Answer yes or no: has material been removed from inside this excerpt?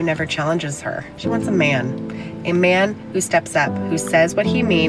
yes